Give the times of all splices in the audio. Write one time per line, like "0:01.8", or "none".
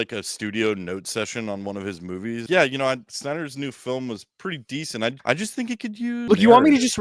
0:02.4
0:05.5